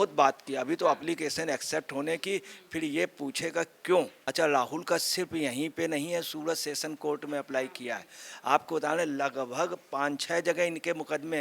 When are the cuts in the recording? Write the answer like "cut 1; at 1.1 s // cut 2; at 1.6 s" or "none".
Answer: cut 1; at 4.2 s